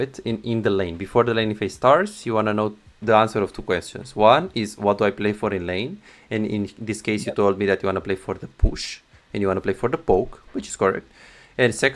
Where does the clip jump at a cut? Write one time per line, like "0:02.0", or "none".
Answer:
none

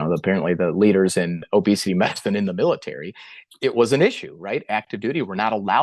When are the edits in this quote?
none

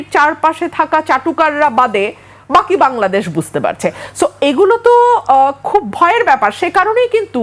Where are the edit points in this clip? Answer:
none

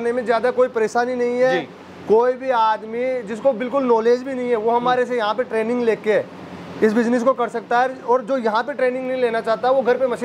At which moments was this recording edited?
none

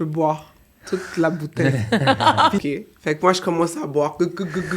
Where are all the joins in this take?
0:02.6

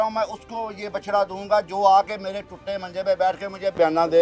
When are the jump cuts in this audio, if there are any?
none

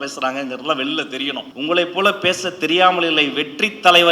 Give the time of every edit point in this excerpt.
0:01.5

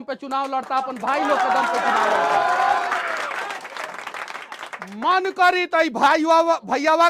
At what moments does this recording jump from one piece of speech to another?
none

